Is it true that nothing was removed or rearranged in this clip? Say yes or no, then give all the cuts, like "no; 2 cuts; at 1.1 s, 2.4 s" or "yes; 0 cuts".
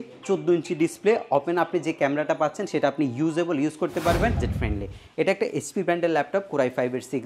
no; 1 cut; at 4.5 s